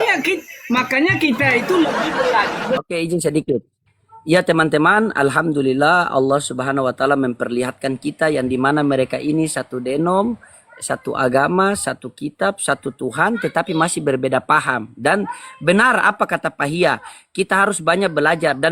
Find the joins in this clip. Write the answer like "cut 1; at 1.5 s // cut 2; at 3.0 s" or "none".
cut 1; at 2.8 s